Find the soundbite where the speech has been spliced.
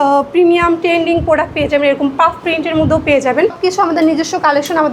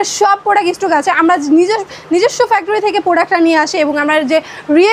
first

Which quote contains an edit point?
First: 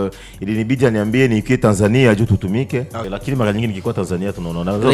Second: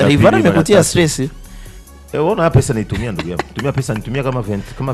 first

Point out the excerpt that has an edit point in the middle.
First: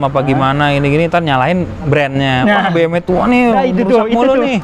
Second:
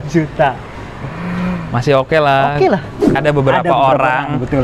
second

